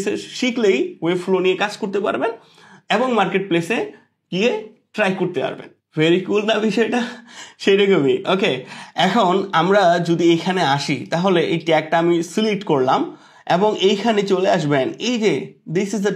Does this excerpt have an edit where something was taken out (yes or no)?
no